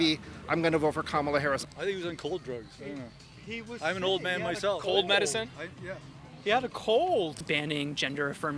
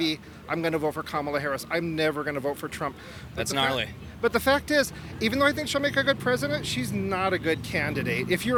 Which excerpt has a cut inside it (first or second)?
first